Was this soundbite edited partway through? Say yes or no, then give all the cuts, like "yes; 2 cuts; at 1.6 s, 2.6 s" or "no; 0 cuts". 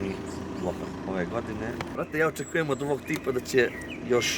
yes; 2 cuts; at 1.0 s, 1.9 s